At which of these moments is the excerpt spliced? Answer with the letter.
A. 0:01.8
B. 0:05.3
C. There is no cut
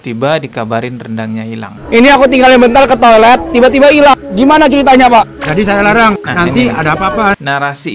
A